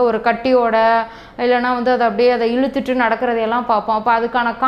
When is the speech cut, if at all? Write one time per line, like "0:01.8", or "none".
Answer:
none